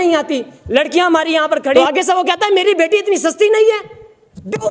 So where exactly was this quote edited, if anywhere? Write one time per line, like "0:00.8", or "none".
0:01.7